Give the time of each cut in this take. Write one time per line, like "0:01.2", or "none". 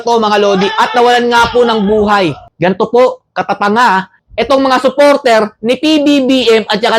0:02.4